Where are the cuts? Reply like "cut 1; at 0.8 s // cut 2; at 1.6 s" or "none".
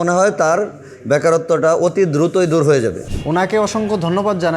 cut 1; at 3.0 s